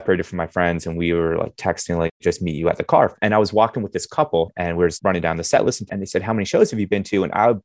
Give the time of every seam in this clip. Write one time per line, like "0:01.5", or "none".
0:02.2
0:03.1
0:04.9
0:05.9